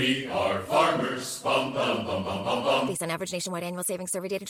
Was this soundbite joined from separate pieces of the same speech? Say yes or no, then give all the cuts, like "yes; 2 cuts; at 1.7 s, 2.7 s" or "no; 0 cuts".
no; 0 cuts